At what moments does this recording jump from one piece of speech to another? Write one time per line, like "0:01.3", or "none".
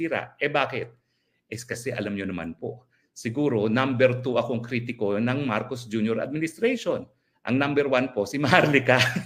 none